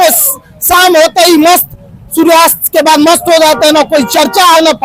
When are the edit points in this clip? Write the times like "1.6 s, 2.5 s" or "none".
none